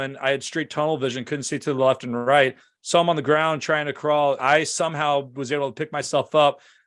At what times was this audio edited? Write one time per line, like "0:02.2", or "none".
0:04.4